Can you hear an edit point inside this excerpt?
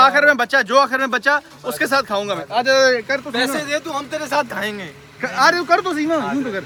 no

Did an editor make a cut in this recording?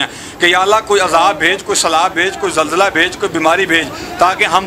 no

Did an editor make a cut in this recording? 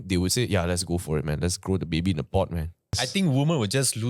yes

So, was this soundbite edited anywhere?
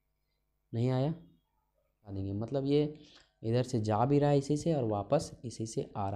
yes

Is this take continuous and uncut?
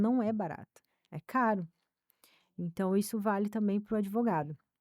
yes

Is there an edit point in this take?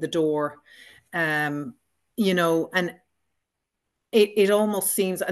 no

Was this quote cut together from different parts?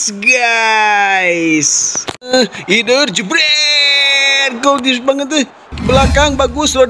yes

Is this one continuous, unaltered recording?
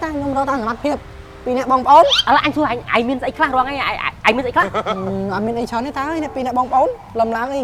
yes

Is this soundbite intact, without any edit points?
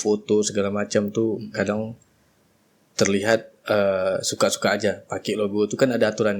yes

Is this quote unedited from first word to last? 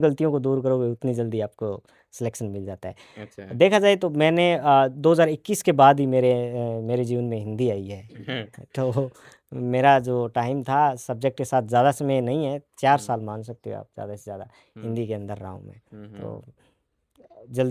yes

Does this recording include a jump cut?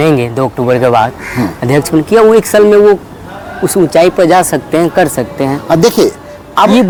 no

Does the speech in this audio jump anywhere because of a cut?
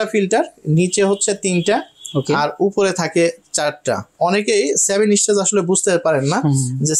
no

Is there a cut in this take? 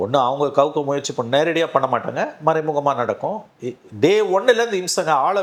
no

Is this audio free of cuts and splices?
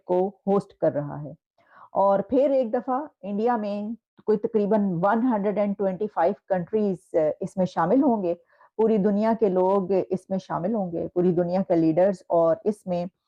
yes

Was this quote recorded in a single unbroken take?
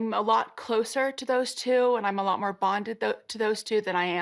yes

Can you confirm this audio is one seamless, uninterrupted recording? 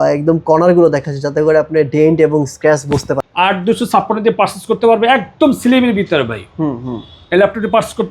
no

